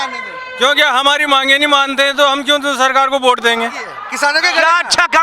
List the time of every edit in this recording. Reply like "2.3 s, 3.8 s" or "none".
4.0 s